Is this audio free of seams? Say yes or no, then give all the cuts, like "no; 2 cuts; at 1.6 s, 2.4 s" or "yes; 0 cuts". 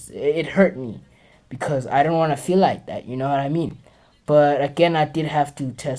yes; 0 cuts